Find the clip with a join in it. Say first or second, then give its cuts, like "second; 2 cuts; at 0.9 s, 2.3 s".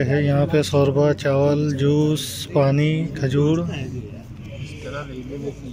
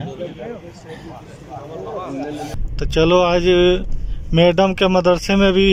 second; 1 cut; at 2.6 s